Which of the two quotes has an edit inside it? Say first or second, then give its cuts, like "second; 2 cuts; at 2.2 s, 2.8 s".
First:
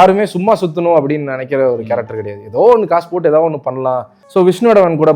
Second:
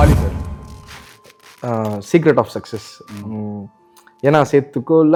first; 1 cut; at 4.1 s